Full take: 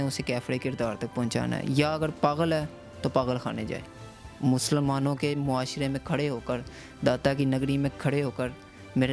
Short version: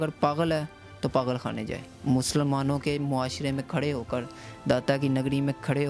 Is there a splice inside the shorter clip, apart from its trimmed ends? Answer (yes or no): yes